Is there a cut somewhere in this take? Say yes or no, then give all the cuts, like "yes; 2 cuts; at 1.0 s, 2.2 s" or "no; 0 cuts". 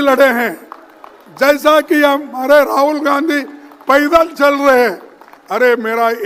no; 0 cuts